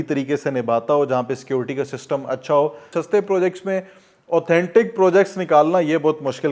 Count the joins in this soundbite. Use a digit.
1